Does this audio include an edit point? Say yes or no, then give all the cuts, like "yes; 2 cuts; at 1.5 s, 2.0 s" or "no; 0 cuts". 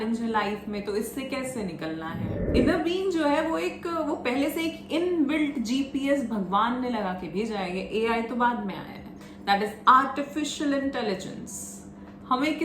yes; 1 cut; at 2.4 s